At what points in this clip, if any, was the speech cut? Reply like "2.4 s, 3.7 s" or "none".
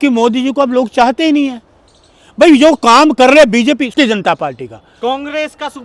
3.9 s